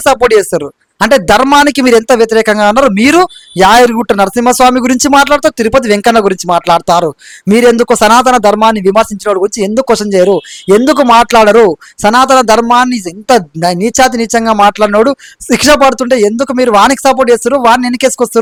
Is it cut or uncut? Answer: uncut